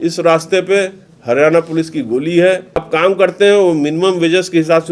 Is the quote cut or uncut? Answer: cut